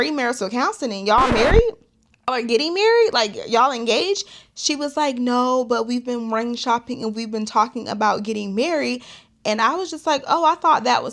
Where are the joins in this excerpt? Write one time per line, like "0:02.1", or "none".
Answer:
0:02.3